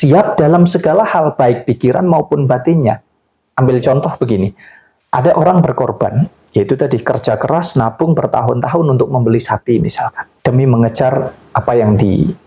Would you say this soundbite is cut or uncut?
cut